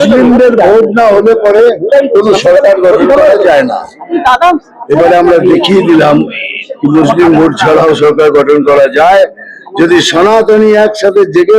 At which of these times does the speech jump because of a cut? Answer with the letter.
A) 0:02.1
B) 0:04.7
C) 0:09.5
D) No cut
D